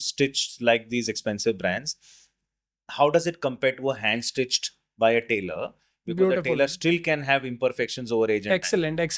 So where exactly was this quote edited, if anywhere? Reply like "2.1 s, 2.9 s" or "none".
none